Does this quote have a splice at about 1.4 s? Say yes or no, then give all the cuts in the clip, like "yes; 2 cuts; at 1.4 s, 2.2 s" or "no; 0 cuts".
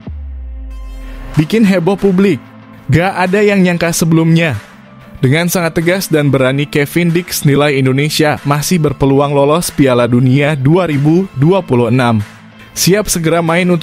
yes; 1 cut; at 1.4 s